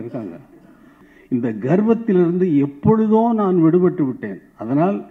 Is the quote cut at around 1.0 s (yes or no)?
yes